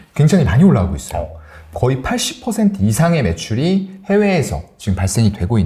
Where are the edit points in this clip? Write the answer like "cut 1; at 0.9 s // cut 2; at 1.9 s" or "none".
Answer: none